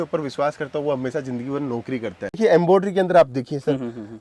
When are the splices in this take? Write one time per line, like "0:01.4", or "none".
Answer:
0:02.4